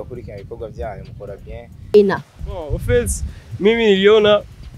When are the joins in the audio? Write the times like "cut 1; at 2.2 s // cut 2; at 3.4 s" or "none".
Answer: cut 1; at 1.9 s